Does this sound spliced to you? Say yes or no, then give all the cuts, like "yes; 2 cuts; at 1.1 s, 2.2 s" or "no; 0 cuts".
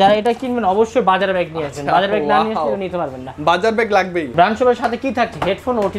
no; 0 cuts